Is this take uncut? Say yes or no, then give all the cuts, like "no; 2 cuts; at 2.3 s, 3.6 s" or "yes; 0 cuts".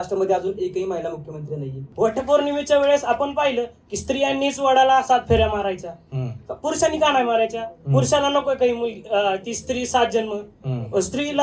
no; 1 cut; at 1.8 s